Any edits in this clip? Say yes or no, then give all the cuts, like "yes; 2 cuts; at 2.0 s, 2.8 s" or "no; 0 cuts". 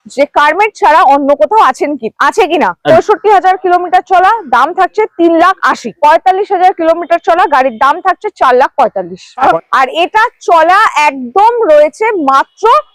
yes; 3 cuts; at 2.8 s, 5.8 s, 9.4 s